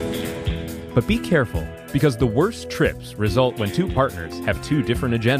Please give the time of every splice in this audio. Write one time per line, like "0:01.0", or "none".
0:00.8
0:01.7